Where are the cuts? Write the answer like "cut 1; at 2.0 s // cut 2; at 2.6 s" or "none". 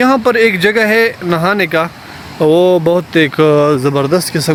none